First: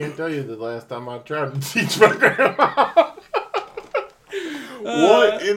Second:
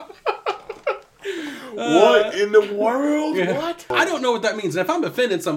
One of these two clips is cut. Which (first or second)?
second